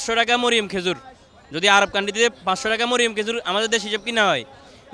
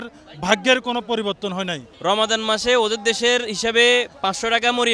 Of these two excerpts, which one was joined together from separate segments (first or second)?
second